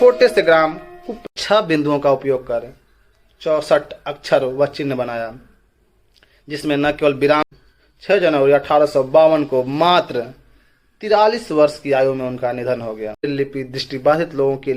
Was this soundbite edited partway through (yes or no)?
yes